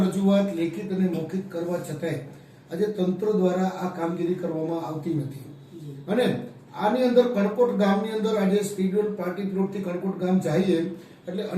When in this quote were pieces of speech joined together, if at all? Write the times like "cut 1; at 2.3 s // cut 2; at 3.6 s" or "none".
none